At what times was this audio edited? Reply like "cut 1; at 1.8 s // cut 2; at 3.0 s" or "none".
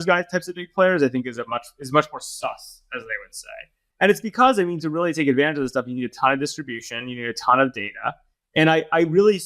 cut 1; at 3.8 s